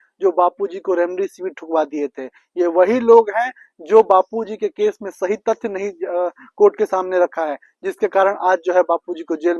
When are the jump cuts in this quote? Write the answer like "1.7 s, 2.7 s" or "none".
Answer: none